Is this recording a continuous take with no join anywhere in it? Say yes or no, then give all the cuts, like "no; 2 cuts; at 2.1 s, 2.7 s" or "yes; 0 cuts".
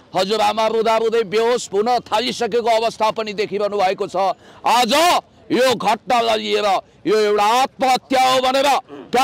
yes; 0 cuts